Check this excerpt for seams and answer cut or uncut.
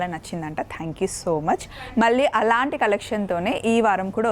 uncut